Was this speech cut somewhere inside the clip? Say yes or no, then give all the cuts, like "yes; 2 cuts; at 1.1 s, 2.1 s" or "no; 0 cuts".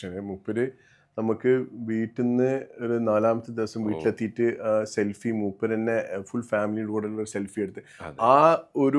no; 0 cuts